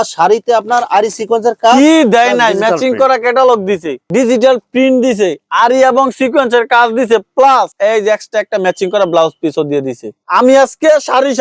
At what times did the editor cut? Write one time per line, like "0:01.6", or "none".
none